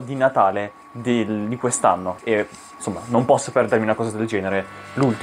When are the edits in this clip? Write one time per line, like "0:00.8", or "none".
0:02.1